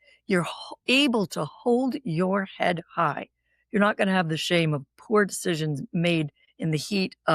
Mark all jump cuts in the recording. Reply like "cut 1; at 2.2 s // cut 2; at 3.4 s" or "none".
cut 1; at 6.4 s